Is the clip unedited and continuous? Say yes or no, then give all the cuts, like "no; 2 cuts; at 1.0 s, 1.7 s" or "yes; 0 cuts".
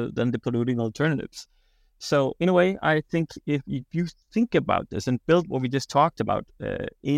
yes; 0 cuts